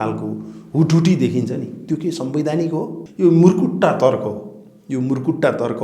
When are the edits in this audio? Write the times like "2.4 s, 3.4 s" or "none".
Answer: 3.0 s